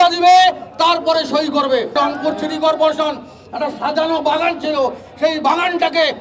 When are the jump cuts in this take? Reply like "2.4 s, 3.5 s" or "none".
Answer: 2.0 s